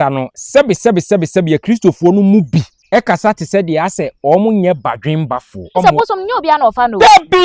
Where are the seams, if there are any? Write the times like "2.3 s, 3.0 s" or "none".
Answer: 2.8 s, 5.5 s